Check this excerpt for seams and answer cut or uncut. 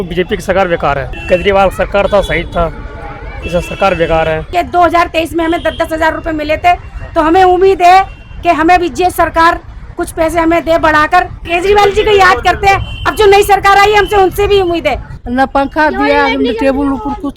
cut